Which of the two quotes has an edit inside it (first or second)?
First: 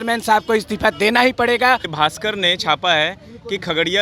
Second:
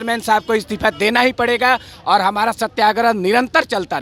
first